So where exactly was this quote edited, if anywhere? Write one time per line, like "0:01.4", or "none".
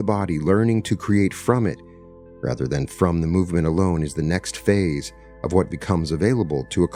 none